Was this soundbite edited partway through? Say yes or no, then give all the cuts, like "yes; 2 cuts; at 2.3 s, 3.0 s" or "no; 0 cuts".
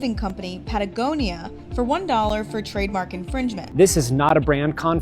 yes; 1 cut; at 3.6 s